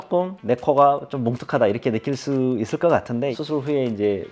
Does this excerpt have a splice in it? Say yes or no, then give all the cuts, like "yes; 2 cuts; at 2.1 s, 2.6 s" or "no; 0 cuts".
yes; 1 cut; at 3.3 s